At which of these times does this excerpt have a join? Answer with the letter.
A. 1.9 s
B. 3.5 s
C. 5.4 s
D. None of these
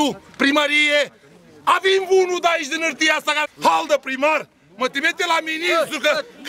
B